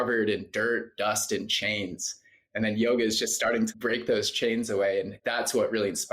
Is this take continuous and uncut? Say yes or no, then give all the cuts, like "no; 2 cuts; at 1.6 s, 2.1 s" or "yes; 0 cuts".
no; 2 cuts; at 3.7 s, 5.2 s